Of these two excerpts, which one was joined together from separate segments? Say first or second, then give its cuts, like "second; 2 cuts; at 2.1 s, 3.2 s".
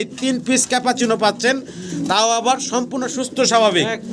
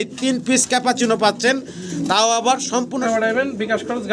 second; 1 cut; at 3.0 s